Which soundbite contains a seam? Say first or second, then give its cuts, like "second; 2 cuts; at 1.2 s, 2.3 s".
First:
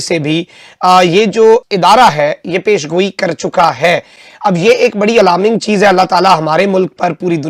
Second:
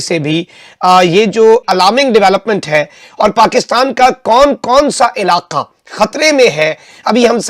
second; 1 cut; at 1.6 s